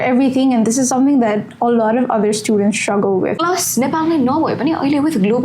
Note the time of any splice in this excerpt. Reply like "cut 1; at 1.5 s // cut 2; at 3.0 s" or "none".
cut 1; at 3.4 s